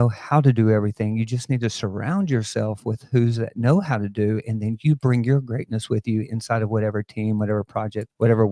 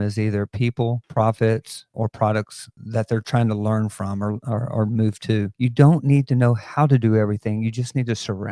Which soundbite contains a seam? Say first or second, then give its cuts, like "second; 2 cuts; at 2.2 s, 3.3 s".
second; 1 cut; at 5.5 s